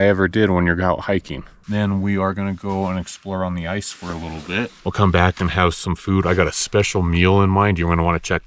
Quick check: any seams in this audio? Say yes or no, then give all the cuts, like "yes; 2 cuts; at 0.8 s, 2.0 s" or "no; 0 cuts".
yes; 2 cuts; at 1.6 s, 4.7 s